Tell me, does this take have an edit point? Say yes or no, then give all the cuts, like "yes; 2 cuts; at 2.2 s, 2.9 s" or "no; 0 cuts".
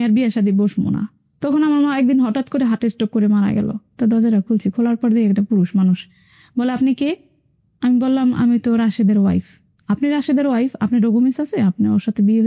yes; 2 cuts; at 1.3 s, 3.8 s